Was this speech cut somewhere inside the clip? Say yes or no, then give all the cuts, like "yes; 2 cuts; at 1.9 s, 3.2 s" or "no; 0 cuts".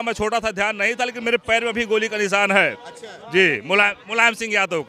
no; 0 cuts